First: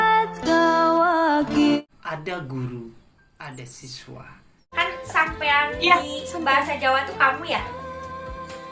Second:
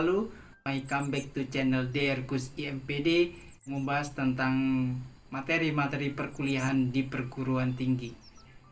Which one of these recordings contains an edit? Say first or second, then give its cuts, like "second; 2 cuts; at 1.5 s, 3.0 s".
first; 1 cut; at 1.8 s